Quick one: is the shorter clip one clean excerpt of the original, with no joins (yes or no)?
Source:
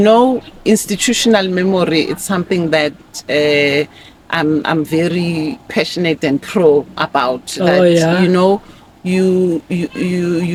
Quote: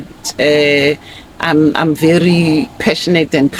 yes